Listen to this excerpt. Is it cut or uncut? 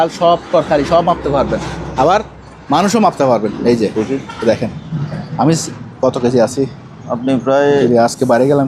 uncut